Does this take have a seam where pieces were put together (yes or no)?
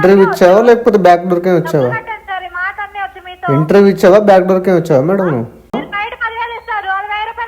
yes